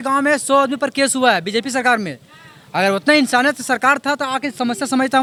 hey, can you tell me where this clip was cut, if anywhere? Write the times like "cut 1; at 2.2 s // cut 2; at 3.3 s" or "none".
none

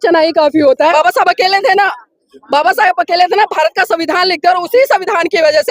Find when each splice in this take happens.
cut 1; at 0.9 s

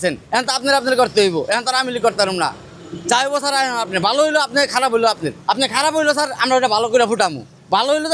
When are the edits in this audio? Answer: cut 1; at 5.3 s

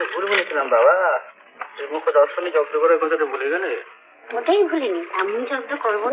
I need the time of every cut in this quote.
none

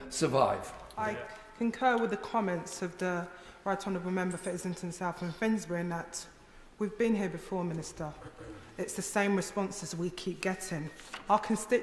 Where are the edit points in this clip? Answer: cut 1; at 1.0 s

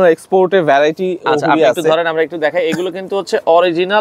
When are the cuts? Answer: none

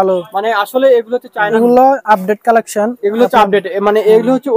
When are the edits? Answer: cut 1; at 1.5 s

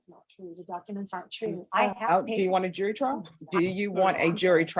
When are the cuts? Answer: cut 1; at 1.9 s // cut 2; at 3.3 s

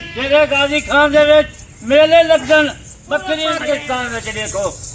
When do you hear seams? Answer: cut 1; at 3.5 s

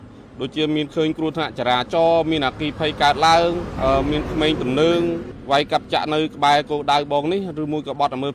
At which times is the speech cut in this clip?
cut 1; at 3.7 s // cut 2; at 5.3 s

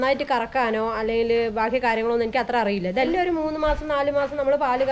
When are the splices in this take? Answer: cut 1; at 3.1 s

